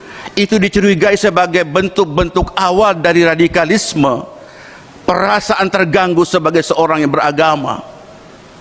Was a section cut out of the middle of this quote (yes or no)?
no